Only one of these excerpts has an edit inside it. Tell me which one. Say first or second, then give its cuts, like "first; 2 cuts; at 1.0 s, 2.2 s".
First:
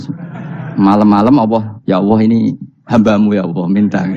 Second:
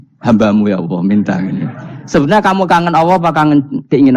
first; 1 cut; at 1.7 s